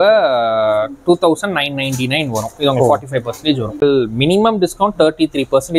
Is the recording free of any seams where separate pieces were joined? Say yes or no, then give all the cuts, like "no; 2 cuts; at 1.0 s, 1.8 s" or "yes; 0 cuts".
no; 1 cut; at 3.8 s